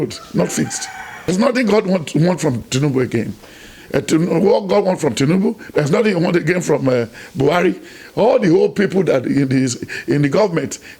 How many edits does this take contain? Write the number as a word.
one